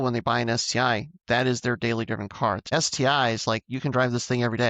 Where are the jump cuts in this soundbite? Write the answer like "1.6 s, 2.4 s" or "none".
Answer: 2.6 s